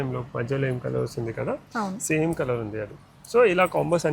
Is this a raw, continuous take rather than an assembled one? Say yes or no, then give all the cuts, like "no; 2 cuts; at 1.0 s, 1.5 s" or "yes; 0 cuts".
yes; 0 cuts